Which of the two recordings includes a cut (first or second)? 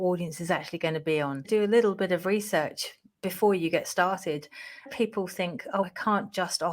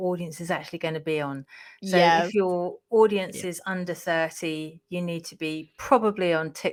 first